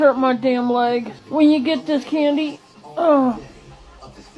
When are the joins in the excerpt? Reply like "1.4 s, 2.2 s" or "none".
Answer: 1.2 s